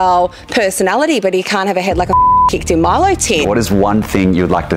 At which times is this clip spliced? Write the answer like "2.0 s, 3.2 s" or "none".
3.4 s